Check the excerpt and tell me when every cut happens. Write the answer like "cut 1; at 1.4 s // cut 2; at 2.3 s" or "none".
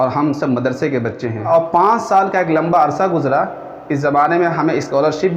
cut 1; at 1.5 s